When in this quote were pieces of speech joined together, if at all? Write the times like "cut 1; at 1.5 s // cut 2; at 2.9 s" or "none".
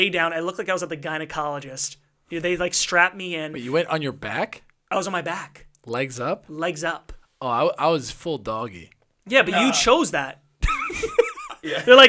none

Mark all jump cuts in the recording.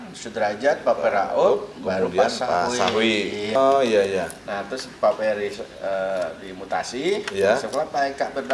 cut 1; at 3.6 s

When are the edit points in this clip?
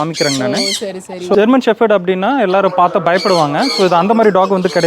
cut 1; at 1.3 s

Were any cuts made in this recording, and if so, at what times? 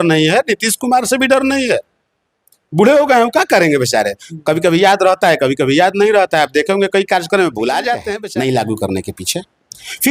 cut 1; at 8.1 s

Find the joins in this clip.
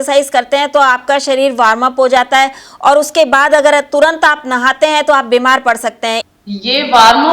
cut 1; at 6.3 s

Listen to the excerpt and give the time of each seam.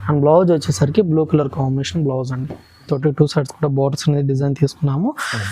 cut 1; at 2.9 s

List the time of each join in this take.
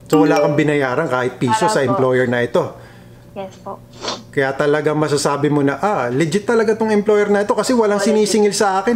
none

